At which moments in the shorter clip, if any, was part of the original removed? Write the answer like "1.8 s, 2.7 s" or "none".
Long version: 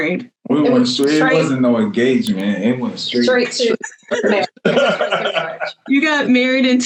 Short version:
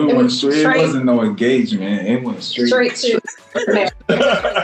none